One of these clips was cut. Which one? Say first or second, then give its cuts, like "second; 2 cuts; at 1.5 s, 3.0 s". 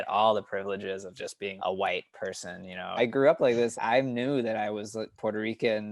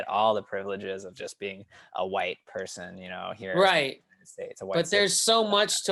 first; 3 cuts; at 1.5 s, 3.0 s, 3.7 s